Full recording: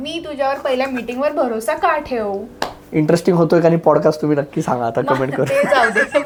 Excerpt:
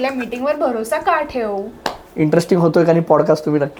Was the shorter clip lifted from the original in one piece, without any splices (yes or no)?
yes